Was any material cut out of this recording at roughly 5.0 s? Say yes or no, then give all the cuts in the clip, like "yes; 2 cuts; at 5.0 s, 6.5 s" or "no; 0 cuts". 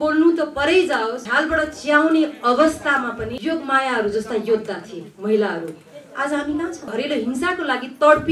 no; 3 cuts; at 1.2 s, 3.3 s, 6.9 s